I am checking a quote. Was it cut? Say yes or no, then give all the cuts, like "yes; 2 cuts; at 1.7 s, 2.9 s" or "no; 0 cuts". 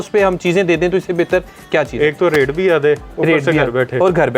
no; 0 cuts